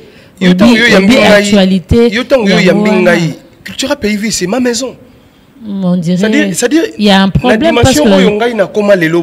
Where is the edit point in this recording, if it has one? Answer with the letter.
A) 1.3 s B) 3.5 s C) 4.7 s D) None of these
D